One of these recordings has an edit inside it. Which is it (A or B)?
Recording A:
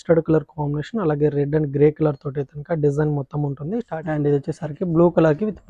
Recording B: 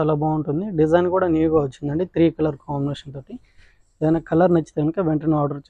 A